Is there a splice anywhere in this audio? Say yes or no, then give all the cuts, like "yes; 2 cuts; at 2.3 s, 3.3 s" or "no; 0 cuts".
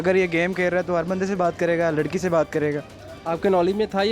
no; 0 cuts